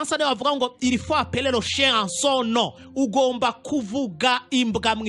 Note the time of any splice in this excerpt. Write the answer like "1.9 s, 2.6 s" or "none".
none